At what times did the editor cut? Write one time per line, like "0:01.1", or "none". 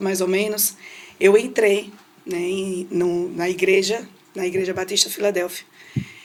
none